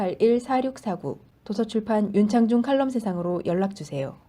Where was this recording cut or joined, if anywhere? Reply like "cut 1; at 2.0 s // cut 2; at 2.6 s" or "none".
cut 1; at 1.2 s